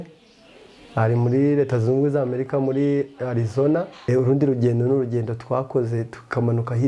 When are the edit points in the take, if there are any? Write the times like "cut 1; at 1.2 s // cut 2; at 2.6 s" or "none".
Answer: cut 1; at 4.1 s